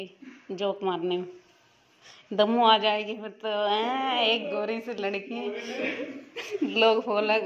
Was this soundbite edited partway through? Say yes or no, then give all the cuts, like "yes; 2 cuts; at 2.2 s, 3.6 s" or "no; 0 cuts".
no; 0 cuts